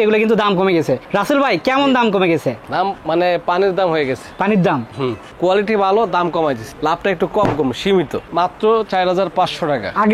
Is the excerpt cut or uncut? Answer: cut